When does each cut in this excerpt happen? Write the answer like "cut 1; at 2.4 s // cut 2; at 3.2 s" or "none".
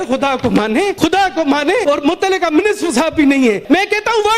cut 1; at 0.9 s // cut 2; at 1.8 s // cut 3; at 3.6 s